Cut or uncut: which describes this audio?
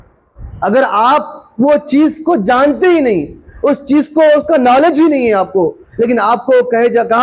uncut